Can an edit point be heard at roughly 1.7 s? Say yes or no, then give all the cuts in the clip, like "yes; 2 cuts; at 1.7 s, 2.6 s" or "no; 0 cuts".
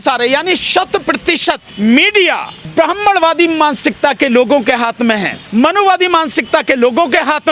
yes; 3 cuts; at 1.7 s, 2.5 s, 5.3 s